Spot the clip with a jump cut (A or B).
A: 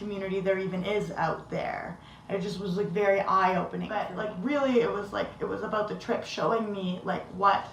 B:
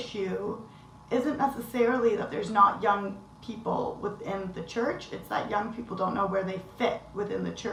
A